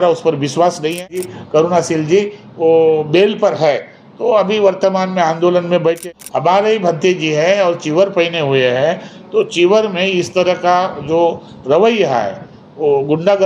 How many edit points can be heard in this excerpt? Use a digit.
2